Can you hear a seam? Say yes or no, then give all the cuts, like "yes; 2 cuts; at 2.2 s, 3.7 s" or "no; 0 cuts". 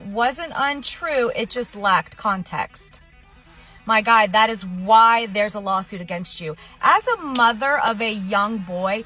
no; 0 cuts